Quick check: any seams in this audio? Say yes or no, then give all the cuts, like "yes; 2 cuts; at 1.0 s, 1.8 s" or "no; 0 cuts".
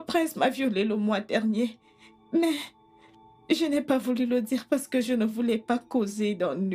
no; 0 cuts